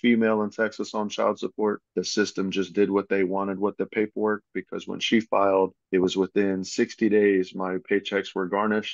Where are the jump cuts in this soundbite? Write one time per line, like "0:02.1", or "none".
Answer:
0:01.8
0:05.8